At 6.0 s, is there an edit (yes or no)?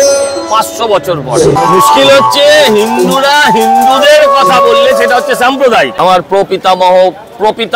yes